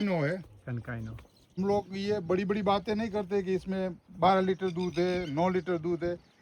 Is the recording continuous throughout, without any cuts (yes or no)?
no